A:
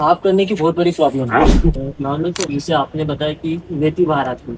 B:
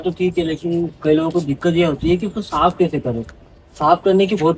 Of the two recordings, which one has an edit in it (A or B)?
A